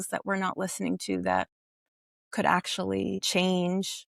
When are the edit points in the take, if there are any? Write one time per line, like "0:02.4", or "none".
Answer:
0:03.3

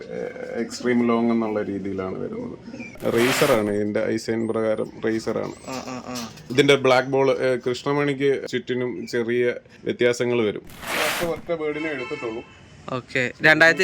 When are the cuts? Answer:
0:02.9
0:06.4
0:08.4
0:09.7
0:10.7

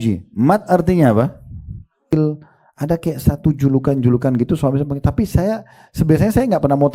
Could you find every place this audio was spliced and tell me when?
0:02.0

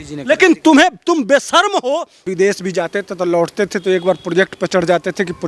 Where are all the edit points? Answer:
0:02.3

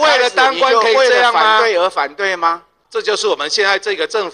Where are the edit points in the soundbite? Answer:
0:02.8

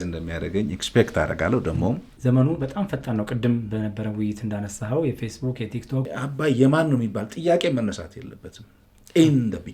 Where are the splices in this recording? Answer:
0:02.1
0:06.1

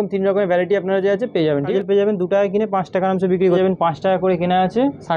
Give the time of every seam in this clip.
0:01.7
0:03.6

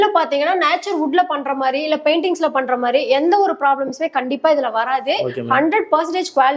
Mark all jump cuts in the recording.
none

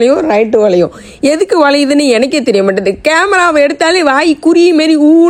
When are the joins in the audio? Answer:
none

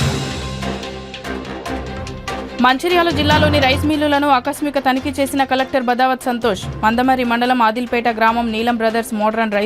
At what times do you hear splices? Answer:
0:02.4

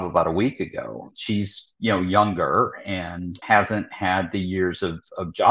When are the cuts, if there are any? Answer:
0:01.1
0:03.4

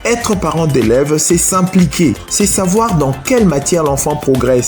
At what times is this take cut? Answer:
0:02.2

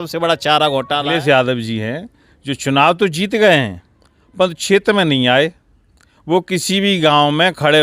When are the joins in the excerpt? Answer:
0:01.1

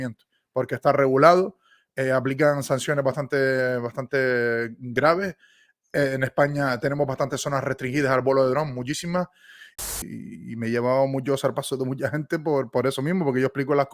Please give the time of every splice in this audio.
0:09.9

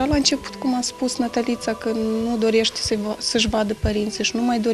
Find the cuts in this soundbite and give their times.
0:01.8

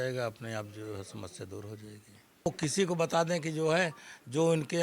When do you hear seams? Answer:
0:02.5

